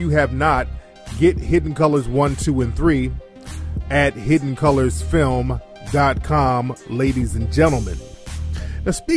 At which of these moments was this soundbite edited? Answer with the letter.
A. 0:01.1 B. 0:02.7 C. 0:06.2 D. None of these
A